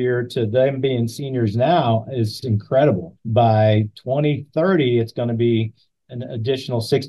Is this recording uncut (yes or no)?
no